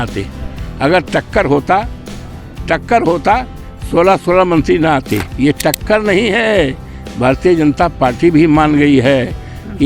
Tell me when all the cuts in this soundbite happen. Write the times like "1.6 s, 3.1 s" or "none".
5.3 s